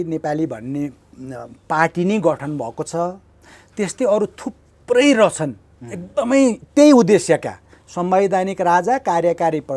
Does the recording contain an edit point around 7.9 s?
no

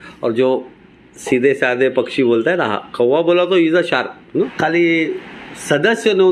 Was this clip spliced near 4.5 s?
yes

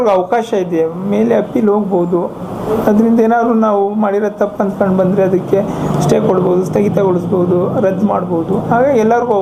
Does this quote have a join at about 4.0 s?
no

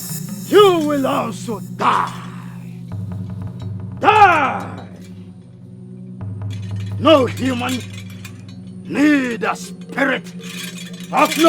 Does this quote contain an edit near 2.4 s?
no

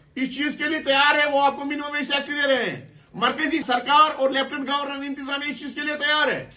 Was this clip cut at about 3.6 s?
yes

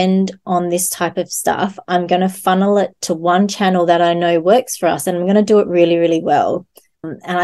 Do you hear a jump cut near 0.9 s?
no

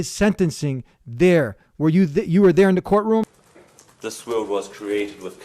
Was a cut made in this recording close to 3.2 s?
yes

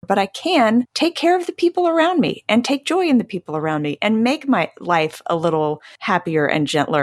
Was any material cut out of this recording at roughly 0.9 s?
yes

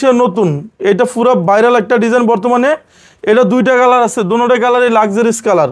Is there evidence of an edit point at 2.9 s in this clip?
no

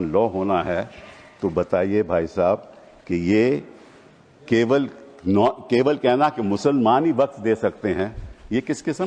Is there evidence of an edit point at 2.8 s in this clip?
no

